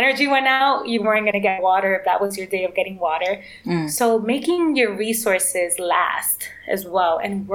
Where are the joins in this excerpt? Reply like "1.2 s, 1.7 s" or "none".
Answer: none